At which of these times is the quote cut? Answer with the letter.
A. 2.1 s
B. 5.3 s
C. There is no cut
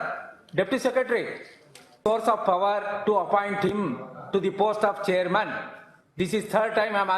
A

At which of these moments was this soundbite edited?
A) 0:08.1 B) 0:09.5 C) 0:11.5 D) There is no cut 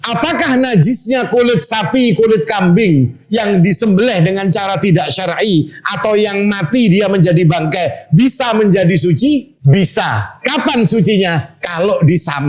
B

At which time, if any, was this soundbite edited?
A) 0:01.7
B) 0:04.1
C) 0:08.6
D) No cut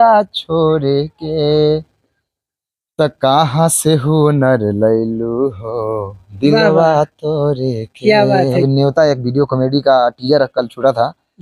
C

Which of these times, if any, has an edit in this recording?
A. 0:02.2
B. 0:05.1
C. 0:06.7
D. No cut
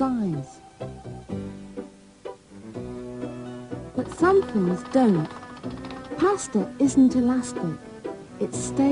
C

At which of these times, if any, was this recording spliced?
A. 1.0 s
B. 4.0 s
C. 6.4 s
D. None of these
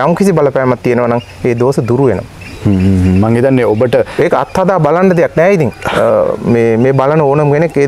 D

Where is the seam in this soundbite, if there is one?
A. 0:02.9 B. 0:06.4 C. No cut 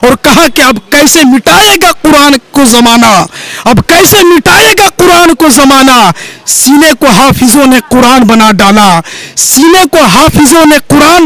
C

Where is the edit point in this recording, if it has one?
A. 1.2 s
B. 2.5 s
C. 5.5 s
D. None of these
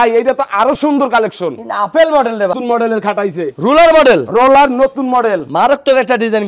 B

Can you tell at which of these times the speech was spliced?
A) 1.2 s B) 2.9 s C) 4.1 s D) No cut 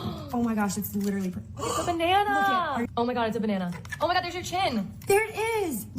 B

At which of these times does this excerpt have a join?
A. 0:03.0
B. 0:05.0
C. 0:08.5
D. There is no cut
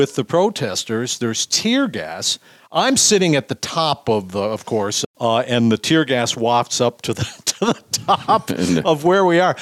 B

